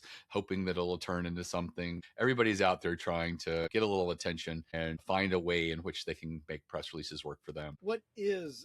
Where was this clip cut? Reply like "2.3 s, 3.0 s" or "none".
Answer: 2.0 s, 3.7 s, 4.9 s, 7.7 s